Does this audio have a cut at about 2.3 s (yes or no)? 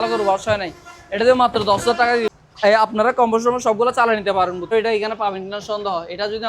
yes